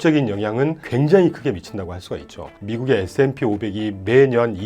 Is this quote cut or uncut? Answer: cut